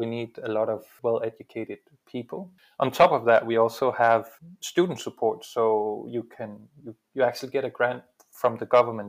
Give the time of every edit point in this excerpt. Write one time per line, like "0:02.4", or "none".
0:02.6